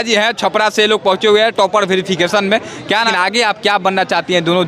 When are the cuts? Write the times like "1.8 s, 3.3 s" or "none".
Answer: 3.0 s